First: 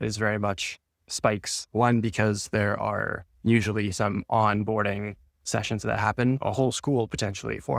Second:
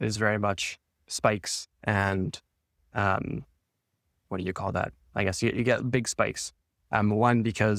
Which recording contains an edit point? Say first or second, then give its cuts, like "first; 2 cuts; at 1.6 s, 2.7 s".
first; 2 cuts; at 1.7 s, 6.4 s